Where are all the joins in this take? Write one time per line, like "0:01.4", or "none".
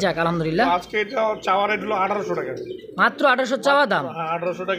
none